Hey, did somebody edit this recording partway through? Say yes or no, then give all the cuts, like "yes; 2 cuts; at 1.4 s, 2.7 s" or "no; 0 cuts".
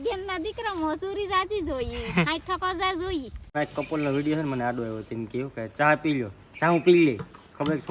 yes; 1 cut; at 3.4 s